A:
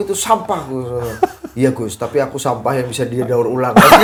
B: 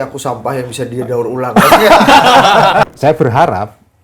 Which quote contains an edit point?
B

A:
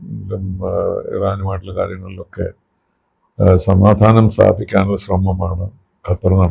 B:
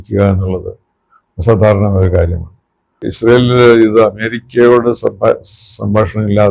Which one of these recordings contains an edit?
B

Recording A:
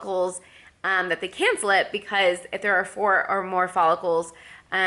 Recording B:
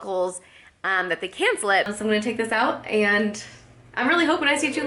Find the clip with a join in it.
B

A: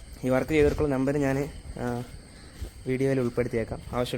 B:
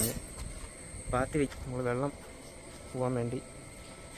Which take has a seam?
B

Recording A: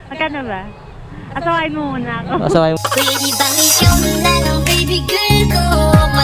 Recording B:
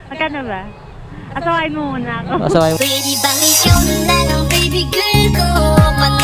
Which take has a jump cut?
B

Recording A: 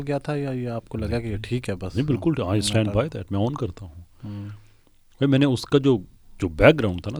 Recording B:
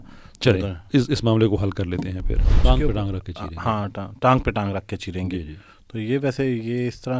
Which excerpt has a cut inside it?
B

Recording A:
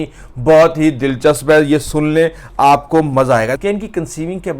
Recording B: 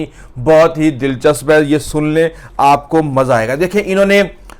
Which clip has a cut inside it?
A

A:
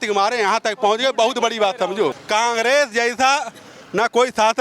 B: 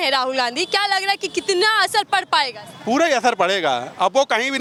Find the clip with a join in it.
A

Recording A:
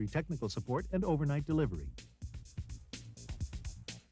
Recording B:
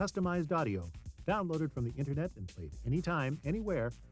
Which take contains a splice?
A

